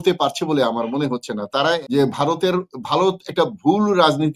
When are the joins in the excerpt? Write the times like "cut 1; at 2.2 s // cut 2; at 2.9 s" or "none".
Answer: cut 1; at 1.8 s